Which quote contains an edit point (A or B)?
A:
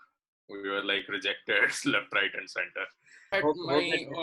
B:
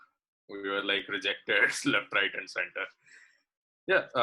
A